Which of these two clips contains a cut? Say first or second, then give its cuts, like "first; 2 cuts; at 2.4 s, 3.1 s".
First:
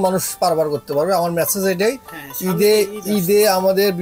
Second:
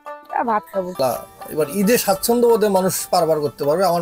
second; 1 cut; at 1.0 s